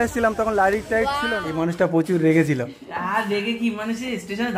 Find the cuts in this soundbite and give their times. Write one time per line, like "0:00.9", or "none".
0:01.4